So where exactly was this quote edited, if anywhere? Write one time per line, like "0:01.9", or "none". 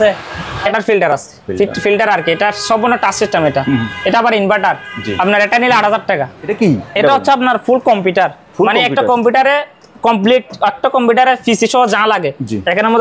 0:00.7
0:06.4